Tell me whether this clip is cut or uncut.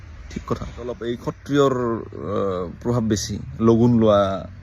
cut